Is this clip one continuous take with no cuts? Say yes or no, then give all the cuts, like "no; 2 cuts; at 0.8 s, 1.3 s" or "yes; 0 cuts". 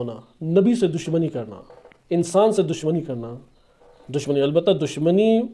yes; 0 cuts